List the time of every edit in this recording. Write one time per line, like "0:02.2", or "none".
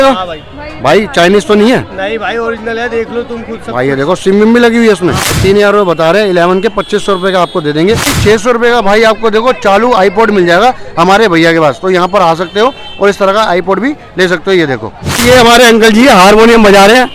0:05.4
0:08.1
0:15.1